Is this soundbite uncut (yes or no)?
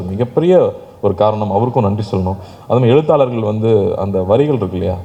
yes